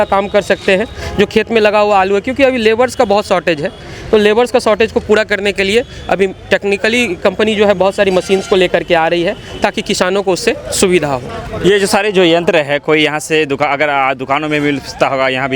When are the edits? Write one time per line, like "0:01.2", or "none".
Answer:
none